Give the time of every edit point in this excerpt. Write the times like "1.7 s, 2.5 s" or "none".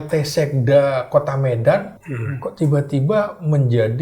2.0 s